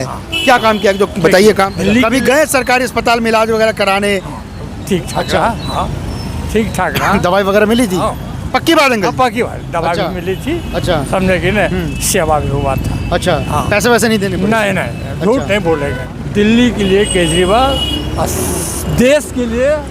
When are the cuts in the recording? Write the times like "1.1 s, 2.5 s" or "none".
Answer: 1.7 s, 16.0 s